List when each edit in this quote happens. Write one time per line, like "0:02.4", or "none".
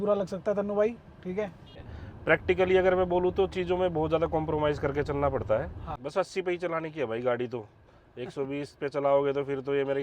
0:01.8
0:05.9